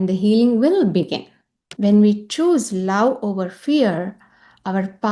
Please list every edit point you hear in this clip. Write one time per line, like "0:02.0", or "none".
0:01.5